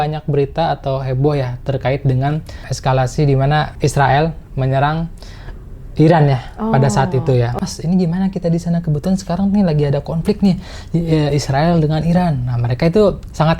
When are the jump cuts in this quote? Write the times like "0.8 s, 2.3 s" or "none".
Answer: 3.7 s, 7.5 s